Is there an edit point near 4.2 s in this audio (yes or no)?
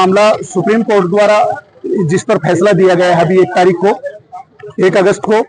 no